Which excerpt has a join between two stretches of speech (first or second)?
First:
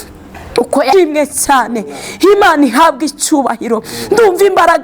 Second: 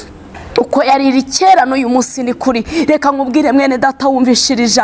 first